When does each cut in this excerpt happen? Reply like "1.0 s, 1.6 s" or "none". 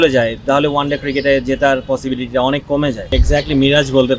3.2 s

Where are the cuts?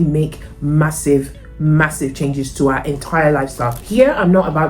3.8 s

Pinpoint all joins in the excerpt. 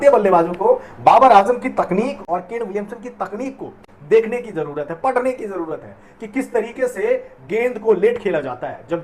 none

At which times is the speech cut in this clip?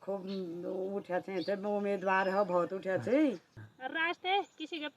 3.5 s

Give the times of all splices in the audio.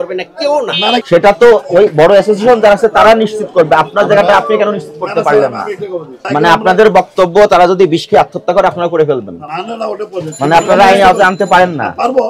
1.0 s, 6.2 s, 9.4 s

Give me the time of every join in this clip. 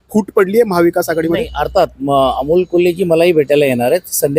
none

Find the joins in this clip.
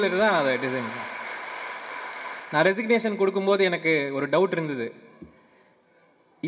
2.4 s

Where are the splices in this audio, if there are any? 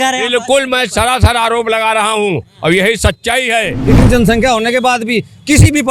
3.8 s

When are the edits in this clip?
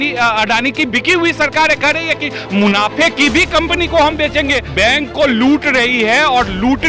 4.6 s

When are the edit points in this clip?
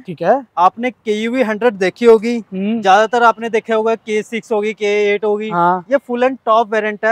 none

